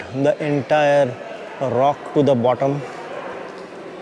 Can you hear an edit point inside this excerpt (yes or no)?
no